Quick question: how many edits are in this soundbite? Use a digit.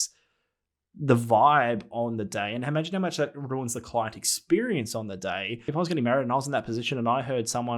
1